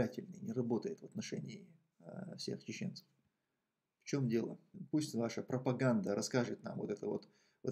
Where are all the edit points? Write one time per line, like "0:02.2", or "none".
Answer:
0:04.7